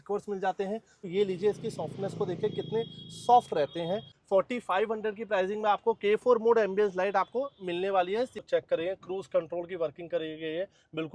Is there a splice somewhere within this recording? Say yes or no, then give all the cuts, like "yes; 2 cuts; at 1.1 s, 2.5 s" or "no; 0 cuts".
yes; 3 cuts; at 1.1 s, 4.1 s, 8.4 s